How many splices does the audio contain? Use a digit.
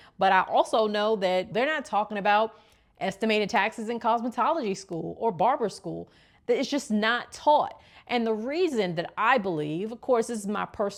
0